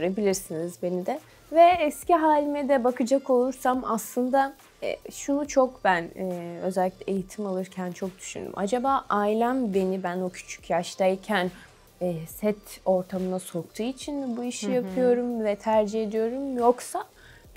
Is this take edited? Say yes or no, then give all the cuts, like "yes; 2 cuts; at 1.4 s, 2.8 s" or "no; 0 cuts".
no; 0 cuts